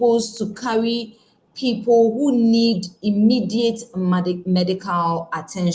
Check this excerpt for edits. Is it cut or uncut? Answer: uncut